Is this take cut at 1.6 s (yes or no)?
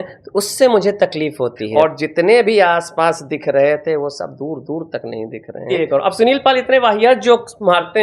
yes